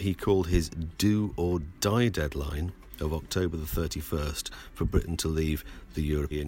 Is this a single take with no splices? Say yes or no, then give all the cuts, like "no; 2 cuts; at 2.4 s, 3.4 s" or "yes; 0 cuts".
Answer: yes; 0 cuts